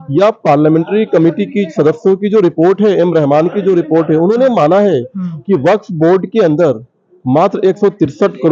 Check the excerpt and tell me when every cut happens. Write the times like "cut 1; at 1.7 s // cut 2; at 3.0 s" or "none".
none